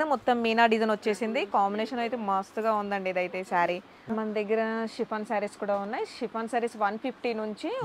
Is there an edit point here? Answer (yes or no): yes